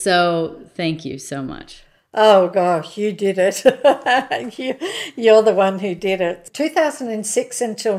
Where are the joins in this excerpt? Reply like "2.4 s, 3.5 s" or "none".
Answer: 6.4 s

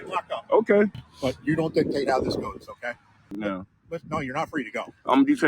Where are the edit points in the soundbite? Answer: 1.1 s, 3.4 s

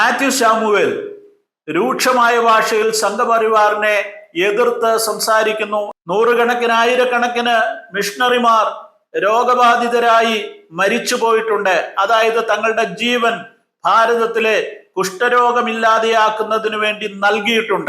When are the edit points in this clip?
5.9 s

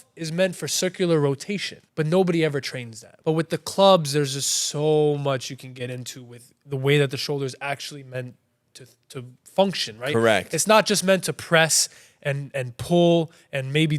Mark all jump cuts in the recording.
1.8 s, 3.1 s

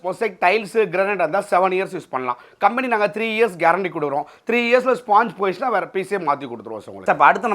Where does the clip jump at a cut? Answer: none

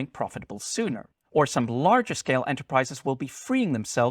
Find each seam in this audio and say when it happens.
1.1 s

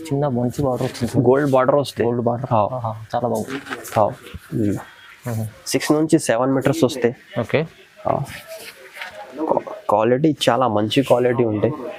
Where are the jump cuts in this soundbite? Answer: none

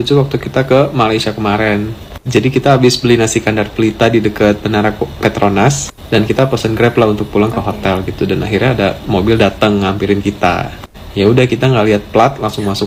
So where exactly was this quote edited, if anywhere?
none

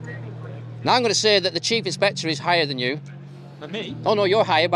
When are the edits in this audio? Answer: none

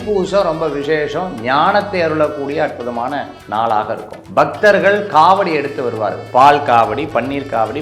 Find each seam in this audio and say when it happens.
4.1 s

